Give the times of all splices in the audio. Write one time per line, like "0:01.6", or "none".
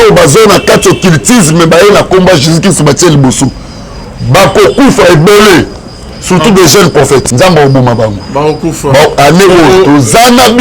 0:07.3